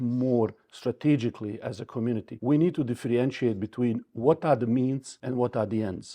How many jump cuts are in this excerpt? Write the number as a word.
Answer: two